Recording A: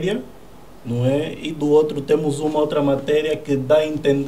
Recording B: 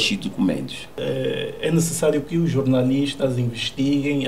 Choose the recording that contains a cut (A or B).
B